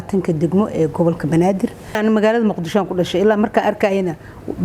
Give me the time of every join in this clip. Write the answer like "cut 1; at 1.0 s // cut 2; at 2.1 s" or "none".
cut 1; at 1.8 s